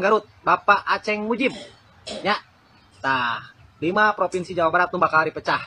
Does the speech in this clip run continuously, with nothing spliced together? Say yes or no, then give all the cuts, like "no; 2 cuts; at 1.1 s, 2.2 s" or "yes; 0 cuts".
yes; 0 cuts